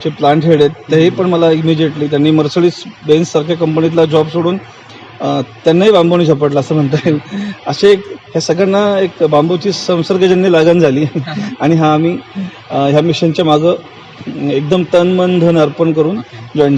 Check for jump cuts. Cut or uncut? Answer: uncut